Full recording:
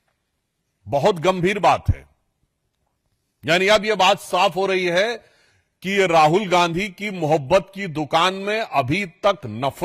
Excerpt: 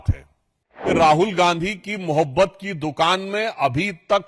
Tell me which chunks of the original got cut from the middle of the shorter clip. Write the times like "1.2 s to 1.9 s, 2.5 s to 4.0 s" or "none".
2.7 s to 6.0 s